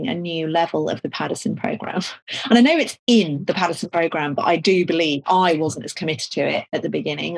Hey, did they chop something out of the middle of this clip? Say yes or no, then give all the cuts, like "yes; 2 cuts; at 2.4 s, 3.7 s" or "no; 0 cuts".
no; 0 cuts